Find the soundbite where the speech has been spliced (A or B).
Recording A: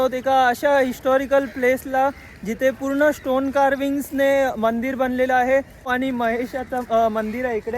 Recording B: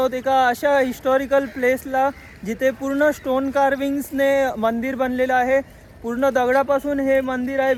A